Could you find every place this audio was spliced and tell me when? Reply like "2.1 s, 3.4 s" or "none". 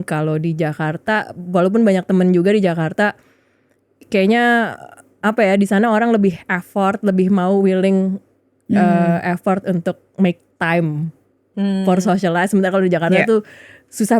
none